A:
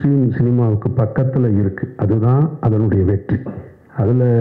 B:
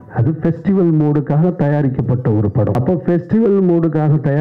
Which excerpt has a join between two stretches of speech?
B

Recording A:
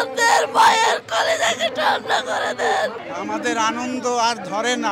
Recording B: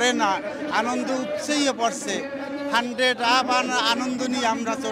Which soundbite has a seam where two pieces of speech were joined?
A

